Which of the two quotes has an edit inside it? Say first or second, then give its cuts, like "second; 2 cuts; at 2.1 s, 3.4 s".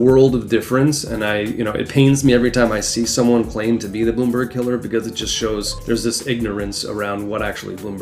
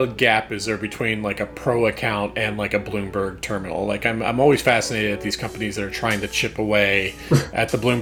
first; 1 cut; at 5.7 s